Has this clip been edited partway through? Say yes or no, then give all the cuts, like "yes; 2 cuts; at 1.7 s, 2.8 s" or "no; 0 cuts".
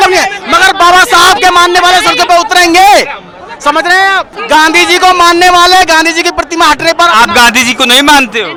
no; 0 cuts